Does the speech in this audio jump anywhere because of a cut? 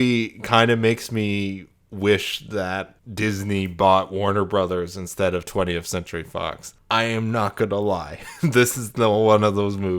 yes; 2 cuts; at 3.0 s, 6.7 s

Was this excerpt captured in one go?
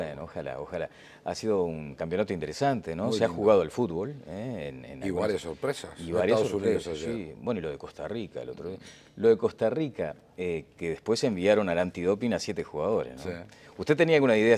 no; 1 cut; at 3.1 s

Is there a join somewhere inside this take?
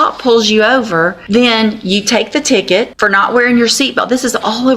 yes; 2 cuts; at 1.2 s, 2.9 s

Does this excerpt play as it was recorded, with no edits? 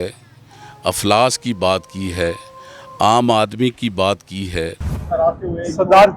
no; 1 cut; at 5.1 s

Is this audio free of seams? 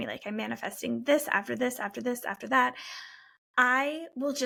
yes; 0 cuts

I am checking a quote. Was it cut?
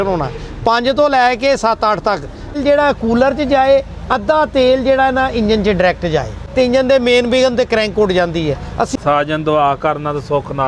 yes; 3 cuts; at 2.6 s, 6.4 s, 8.9 s

